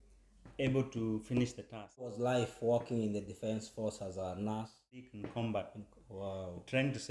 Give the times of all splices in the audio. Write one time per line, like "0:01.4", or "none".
0:02.2
0:05.2

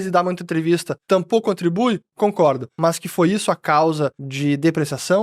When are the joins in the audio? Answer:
0:00.9
0:02.7
0:04.2

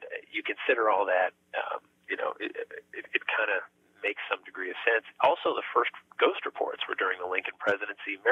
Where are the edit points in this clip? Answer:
none

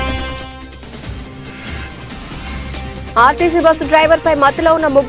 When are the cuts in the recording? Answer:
0:03.1

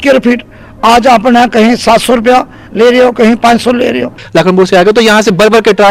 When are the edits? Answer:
0:04.2

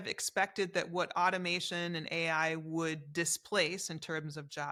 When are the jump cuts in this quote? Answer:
none

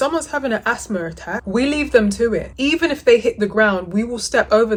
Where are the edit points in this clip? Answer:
none

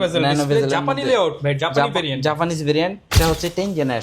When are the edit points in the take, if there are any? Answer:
0:03.0

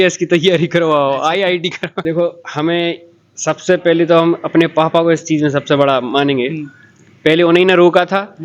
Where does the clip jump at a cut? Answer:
0:02.0

